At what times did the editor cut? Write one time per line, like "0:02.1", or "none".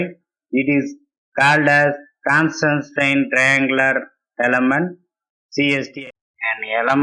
0:05.9